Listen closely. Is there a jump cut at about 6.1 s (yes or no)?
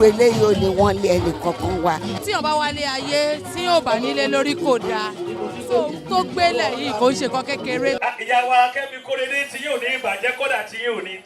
no